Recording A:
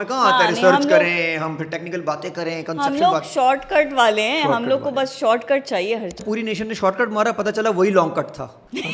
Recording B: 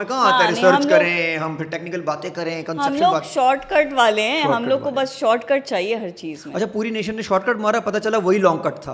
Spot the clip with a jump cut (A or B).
A